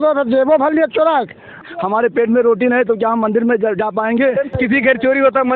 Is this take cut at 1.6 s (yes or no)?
yes